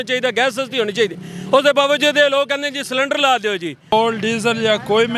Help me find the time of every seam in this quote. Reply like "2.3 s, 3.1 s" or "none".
3.9 s